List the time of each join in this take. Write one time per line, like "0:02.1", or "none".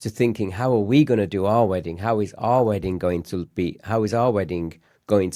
none

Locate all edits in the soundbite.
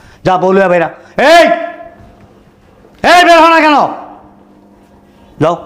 none

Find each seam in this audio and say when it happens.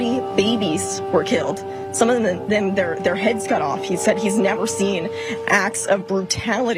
none

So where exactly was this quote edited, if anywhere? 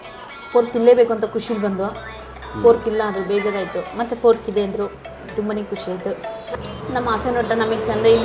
none

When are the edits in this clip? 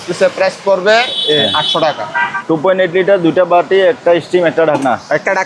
0:02.3

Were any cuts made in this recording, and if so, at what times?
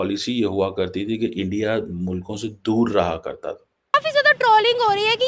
0:03.9

